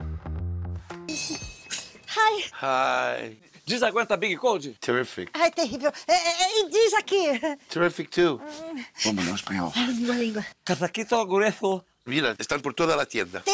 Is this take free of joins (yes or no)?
no